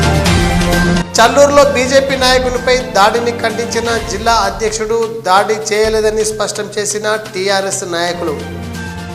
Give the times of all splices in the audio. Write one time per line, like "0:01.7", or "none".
0:01.0

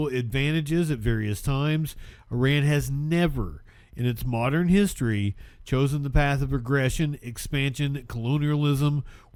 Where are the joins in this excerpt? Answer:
none

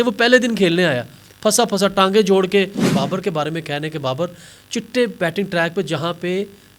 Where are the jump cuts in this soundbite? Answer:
0:02.8

